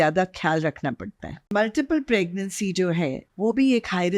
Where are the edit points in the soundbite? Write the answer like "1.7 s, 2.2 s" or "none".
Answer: 1.5 s, 3.2 s